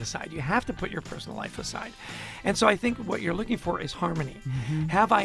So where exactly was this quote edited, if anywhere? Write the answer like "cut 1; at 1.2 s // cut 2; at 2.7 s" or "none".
none